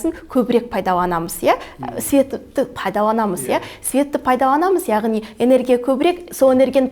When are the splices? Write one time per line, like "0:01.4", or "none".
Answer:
none